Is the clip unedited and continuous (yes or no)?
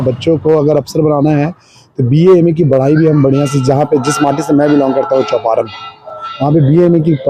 yes